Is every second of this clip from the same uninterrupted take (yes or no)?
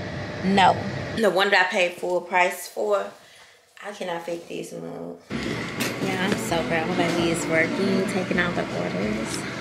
no